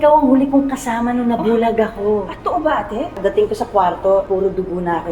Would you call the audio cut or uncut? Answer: cut